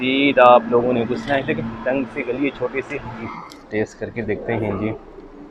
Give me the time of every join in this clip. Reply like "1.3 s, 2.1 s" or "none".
3.4 s